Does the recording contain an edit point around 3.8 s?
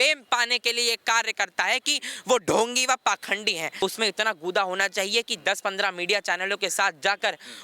yes; 1 cut; at 3.8 s

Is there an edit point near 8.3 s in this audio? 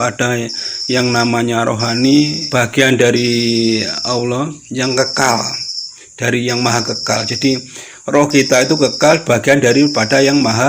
no; 1 cut; at 2.4 s

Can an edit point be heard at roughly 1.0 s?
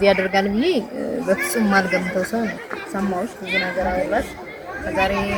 no; 0 cuts

